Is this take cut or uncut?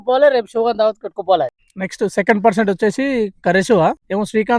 cut